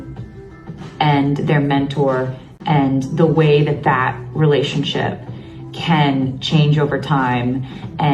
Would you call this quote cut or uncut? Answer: uncut